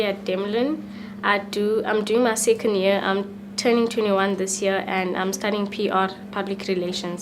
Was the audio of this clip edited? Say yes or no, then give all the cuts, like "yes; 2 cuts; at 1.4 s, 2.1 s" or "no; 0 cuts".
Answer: yes; 1 cut; at 4.8 s